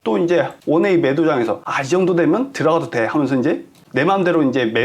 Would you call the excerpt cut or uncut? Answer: cut